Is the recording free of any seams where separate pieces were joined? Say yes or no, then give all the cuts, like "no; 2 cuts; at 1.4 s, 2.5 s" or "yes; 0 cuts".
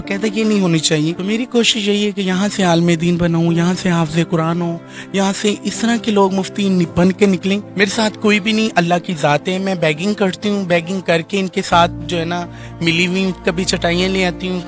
no; 2 cuts; at 1.2 s, 7.7 s